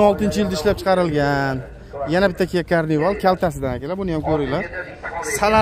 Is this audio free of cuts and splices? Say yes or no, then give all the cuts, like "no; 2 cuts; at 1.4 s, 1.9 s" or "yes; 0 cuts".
yes; 0 cuts